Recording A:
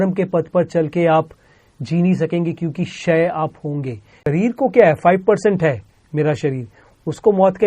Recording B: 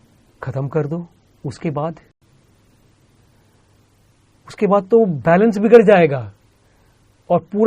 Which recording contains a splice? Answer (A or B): A